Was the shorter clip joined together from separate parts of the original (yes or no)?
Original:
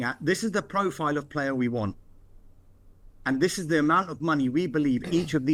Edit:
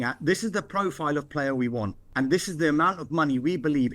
yes